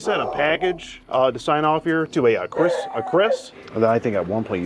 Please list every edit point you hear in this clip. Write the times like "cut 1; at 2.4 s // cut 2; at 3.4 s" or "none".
cut 1; at 3.6 s